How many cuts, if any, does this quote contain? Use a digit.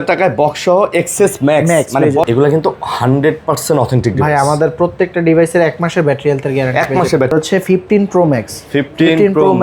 2